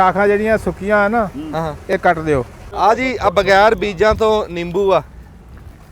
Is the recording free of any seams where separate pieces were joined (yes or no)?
no